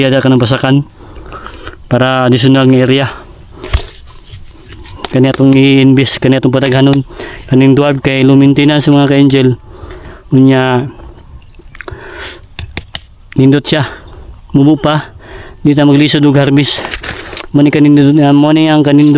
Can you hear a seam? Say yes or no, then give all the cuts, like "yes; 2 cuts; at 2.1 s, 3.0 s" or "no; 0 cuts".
no; 0 cuts